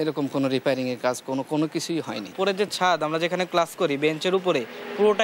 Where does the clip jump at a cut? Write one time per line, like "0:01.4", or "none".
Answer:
0:02.2